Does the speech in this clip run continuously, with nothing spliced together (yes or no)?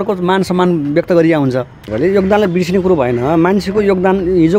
no